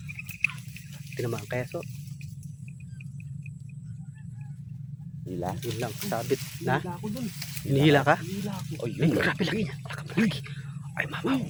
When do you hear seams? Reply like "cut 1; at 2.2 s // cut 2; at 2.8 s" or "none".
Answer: none